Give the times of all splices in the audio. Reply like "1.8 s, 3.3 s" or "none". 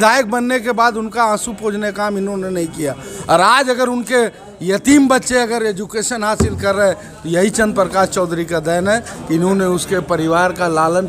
none